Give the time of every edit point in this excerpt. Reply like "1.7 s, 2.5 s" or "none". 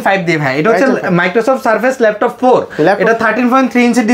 none